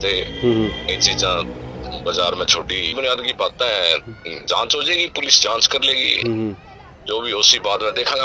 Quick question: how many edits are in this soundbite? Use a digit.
1